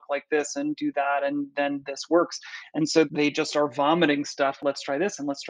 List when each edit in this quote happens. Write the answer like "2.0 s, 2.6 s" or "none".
3.1 s, 4.6 s